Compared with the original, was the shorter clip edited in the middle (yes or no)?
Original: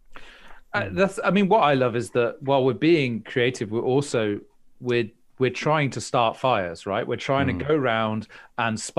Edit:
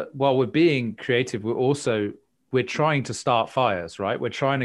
yes